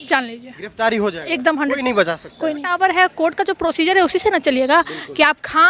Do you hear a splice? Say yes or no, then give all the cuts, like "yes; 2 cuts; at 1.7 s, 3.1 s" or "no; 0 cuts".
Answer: yes; 1 cut; at 2.7 s